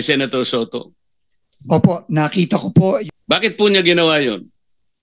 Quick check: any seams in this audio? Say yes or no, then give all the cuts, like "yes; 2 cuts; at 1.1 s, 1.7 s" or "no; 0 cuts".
yes; 1 cut; at 3.0 s